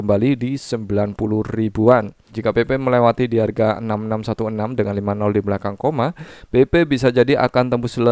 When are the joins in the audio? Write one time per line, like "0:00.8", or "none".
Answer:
0:02.3